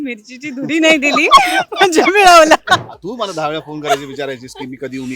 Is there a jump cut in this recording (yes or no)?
yes